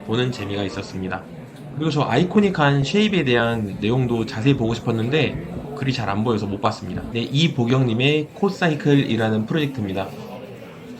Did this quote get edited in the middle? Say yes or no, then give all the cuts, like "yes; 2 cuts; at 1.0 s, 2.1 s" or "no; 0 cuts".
no; 0 cuts